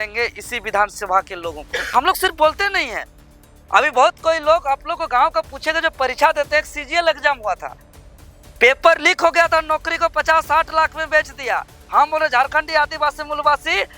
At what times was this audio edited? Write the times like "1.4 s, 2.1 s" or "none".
1.9 s

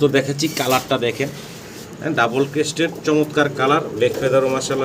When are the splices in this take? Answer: none

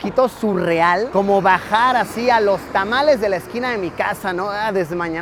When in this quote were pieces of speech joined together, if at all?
none

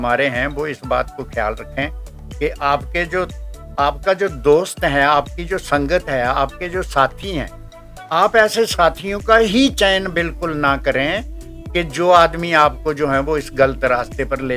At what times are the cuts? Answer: none

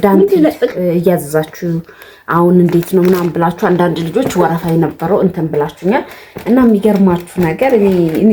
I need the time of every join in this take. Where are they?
none

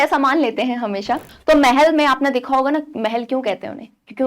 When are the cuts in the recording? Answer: 1.3 s

